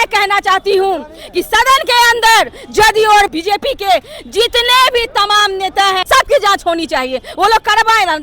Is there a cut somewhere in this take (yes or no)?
yes